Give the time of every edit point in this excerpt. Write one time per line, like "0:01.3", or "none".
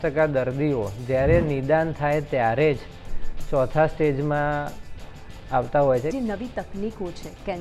0:06.1